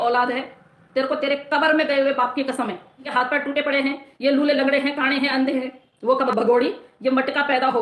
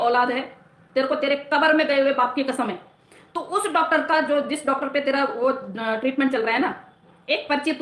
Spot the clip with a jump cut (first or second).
first